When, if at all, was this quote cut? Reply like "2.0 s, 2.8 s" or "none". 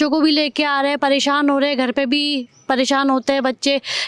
none